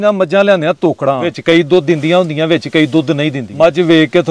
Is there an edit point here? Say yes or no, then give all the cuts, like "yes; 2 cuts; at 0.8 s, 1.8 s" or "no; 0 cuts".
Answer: yes; 2 cuts; at 1.3 s, 3.4 s